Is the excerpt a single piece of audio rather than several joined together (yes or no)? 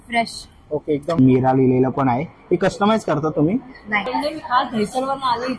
no